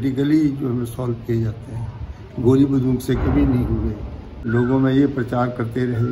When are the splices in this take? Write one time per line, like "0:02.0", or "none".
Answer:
0:04.5